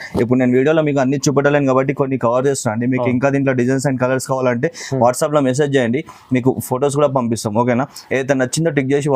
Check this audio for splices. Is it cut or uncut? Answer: uncut